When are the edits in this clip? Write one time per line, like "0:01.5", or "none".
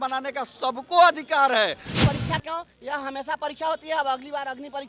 0:01.9